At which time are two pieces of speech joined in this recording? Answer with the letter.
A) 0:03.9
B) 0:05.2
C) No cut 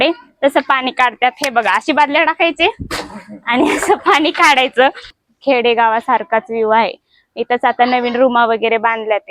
B